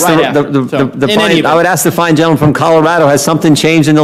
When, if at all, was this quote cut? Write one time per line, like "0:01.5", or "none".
none